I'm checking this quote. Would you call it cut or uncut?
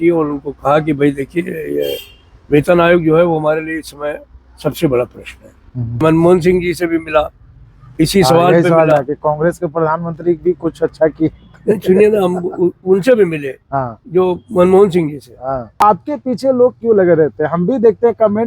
cut